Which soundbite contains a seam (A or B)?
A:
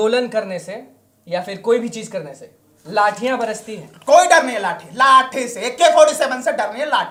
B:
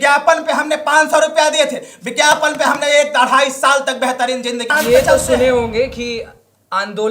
B